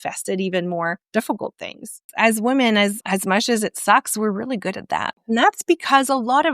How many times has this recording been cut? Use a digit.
3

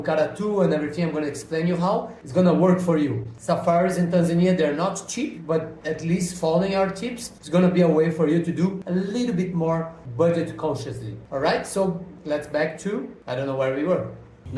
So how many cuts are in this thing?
0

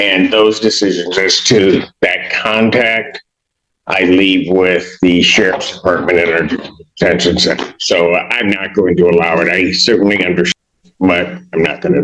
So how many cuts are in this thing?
1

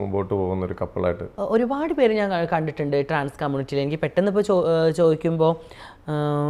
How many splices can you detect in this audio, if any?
0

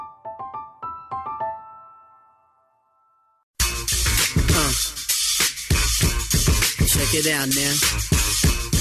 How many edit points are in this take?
1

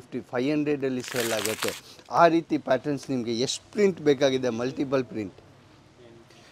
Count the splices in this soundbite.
0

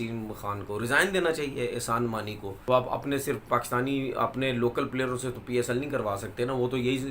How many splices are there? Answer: 1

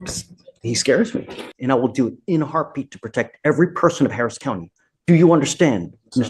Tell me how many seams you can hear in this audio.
1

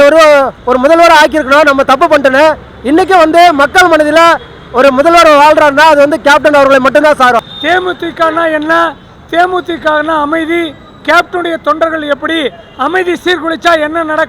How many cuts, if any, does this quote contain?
1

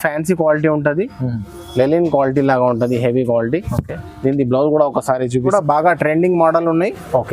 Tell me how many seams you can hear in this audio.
1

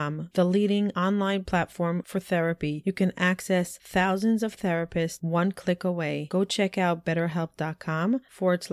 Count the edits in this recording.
0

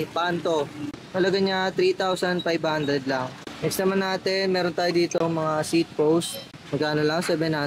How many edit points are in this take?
0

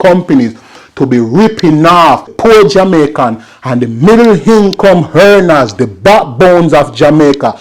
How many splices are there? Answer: 1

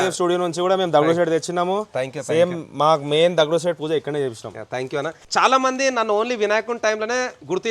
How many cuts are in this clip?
1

